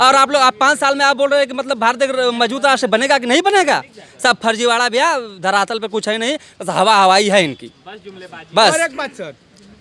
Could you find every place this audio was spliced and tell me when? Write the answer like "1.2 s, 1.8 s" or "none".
none